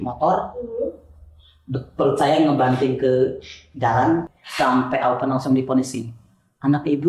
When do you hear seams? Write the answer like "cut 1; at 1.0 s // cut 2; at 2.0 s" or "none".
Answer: cut 1; at 4.3 s